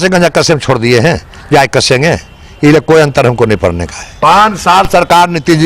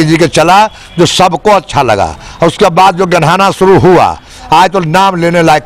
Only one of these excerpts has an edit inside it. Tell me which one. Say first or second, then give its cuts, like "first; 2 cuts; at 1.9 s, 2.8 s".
first; 1 cut; at 4.2 s